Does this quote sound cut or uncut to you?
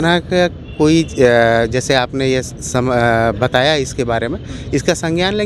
uncut